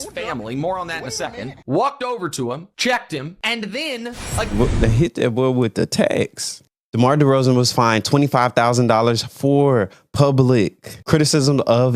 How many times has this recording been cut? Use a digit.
1